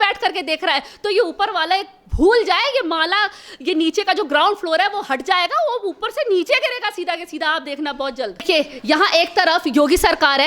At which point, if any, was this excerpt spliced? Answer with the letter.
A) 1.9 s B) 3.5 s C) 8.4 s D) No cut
C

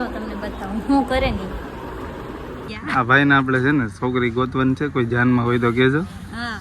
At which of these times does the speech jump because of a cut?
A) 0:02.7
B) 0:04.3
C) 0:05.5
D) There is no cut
A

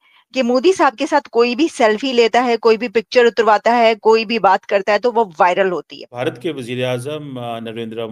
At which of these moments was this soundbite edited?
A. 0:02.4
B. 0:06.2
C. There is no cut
B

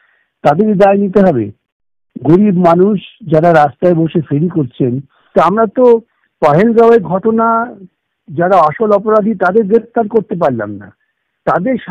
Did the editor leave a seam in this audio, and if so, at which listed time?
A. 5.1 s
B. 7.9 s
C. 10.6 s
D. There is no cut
A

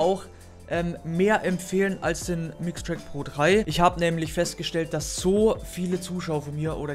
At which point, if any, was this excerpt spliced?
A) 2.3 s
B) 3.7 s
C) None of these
B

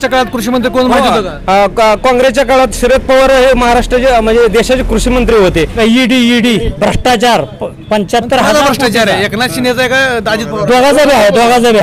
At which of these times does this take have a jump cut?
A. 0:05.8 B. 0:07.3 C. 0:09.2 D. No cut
A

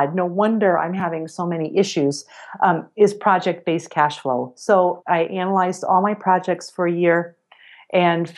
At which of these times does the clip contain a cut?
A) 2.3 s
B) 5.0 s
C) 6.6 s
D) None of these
B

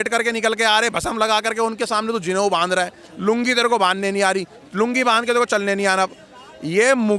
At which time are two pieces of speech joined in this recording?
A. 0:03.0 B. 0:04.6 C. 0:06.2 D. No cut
D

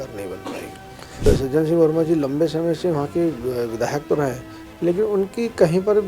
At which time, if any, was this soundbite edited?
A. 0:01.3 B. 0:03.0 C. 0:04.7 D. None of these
A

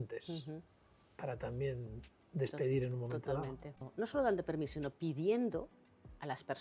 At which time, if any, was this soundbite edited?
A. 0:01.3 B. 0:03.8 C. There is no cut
B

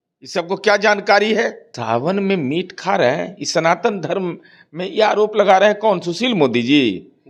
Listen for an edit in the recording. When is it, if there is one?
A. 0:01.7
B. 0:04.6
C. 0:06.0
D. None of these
A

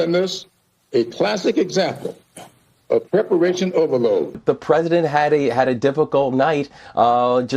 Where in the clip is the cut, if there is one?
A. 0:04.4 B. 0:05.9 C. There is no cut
A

